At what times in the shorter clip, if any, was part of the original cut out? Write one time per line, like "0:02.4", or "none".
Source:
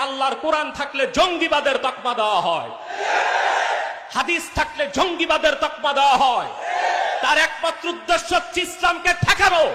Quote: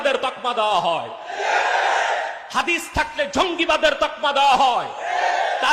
none